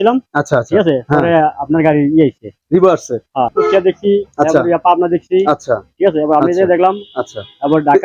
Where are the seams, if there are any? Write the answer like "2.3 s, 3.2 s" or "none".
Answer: 3.5 s